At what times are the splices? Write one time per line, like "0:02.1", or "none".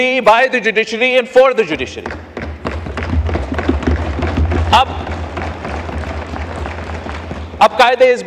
none